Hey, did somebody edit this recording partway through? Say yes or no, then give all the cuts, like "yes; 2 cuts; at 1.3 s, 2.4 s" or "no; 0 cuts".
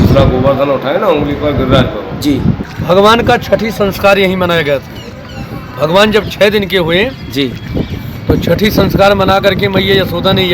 yes; 1 cut; at 2.7 s